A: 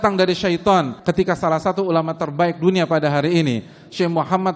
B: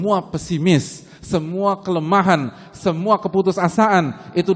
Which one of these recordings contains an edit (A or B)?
A